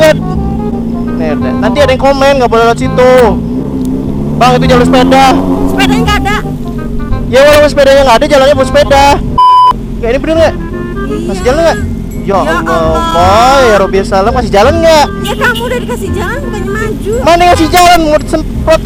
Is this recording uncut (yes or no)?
yes